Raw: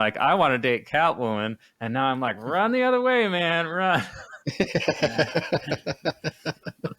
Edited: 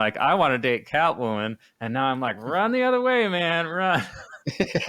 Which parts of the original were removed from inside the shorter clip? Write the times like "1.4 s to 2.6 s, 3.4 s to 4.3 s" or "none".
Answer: none